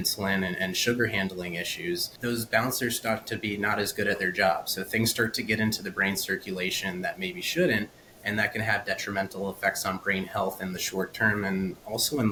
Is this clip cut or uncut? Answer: uncut